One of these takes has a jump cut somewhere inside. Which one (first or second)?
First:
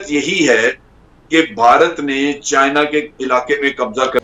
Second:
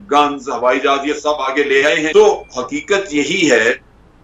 second